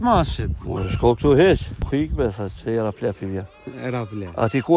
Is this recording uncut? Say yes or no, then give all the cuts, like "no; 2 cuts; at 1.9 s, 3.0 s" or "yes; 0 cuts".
no; 1 cut; at 1.8 s